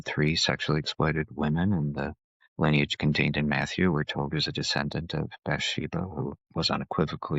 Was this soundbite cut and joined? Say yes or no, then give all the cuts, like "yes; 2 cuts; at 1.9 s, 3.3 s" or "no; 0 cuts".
yes; 1 cut; at 6.4 s